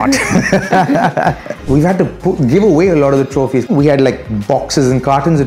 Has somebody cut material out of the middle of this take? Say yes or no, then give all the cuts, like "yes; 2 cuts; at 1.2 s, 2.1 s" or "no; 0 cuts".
yes; 2 cuts; at 1.6 s, 3.7 s